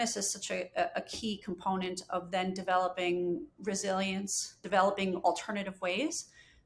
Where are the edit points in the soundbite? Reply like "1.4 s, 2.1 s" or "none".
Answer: 4.6 s